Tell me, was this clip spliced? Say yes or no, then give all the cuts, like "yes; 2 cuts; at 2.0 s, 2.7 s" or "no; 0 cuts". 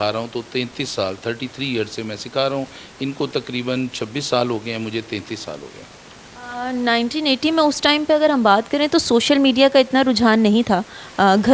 no; 0 cuts